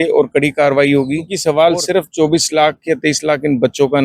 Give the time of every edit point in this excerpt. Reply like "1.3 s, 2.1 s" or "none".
1.3 s